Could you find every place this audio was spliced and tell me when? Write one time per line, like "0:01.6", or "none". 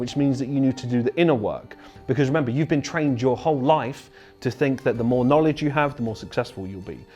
0:01.9